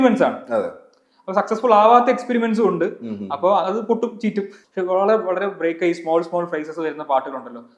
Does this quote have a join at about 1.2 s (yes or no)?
no